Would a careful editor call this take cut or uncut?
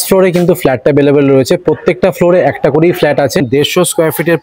cut